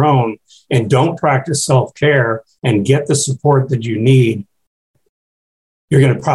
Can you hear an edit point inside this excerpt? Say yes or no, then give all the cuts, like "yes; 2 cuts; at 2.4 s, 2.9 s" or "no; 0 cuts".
no; 0 cuts